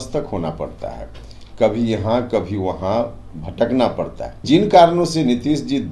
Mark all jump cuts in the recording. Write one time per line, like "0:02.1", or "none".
0:04.4